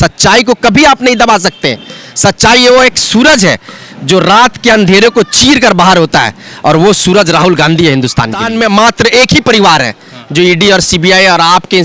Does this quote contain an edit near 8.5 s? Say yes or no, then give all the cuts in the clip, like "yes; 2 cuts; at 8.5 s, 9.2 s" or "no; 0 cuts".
yes; 1 cut; at 8.5 s